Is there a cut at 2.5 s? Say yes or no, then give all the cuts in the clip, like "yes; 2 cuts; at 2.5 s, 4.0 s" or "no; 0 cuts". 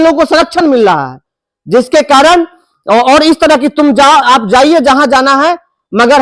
no; 0 cuts